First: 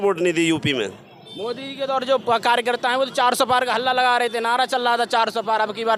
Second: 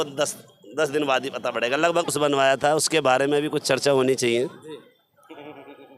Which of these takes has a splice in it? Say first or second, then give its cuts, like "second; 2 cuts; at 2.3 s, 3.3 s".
second; 1 cut; at 2.1 s